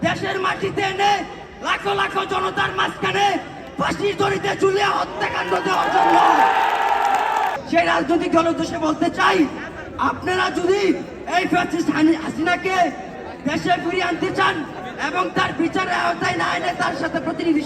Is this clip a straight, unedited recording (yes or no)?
no